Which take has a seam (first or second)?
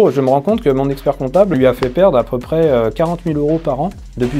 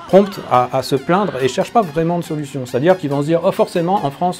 first